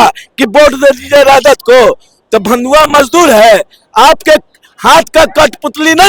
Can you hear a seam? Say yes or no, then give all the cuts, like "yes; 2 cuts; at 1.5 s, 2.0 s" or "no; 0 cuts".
no; 0 cuts